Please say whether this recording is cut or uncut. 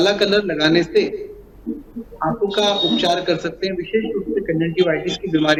uncut